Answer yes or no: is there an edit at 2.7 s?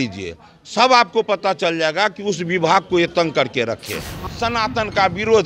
no